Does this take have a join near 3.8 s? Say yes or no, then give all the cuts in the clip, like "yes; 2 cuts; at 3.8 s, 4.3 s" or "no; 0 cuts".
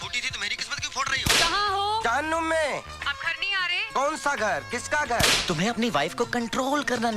no; 2 cuts; at 1.4 s, 5.3 s